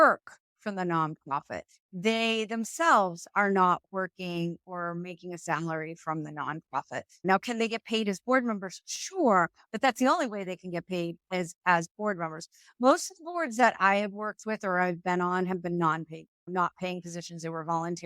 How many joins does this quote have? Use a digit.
1